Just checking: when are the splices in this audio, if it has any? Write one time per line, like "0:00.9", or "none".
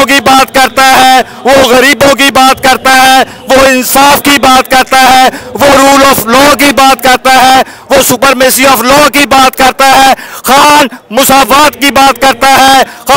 none